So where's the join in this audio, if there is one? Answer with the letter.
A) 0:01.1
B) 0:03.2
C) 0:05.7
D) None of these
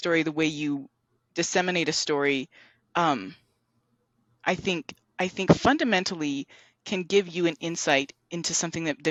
D